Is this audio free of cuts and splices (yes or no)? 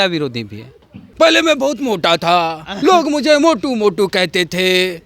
no